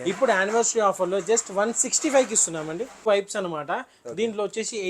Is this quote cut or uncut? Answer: cut